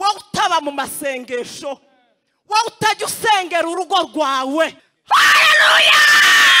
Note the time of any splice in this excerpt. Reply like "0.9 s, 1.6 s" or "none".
4.9 s